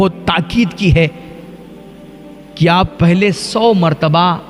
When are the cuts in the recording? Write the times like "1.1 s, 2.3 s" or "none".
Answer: none